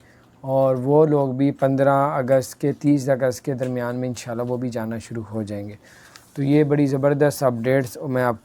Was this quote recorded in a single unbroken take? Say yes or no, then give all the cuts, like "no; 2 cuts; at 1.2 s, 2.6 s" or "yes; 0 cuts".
yes; 0 cuts